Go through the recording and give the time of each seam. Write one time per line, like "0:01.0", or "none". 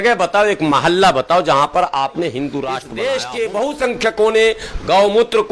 0:02.8